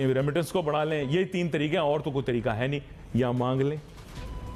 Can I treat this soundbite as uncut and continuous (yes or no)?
yes